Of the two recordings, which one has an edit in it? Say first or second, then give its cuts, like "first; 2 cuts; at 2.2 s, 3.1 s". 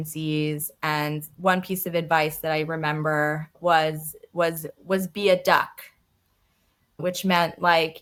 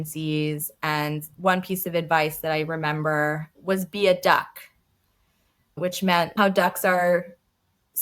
second; 2 cuts; at 3.5 s, 6.4 s